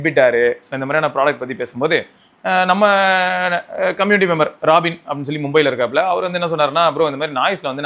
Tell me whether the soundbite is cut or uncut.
uncut